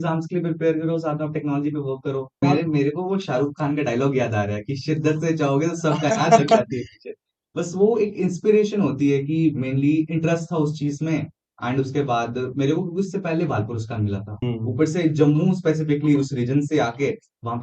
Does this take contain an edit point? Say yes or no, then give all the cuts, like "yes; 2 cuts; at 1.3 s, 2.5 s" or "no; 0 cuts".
yes; 2 cuts; at 2.4 s, 14.4 s